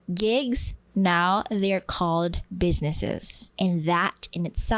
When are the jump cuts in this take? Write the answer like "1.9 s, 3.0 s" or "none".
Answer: 2.4 s, 3.4 s